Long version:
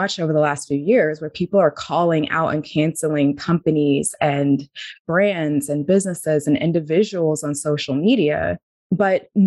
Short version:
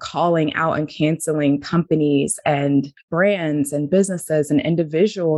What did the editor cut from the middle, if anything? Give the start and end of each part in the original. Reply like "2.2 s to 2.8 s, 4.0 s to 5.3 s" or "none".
4.8 s to 5.0 s